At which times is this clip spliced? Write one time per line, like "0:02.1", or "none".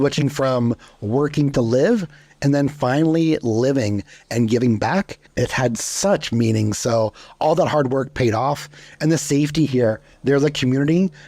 0:05.3
0:10.1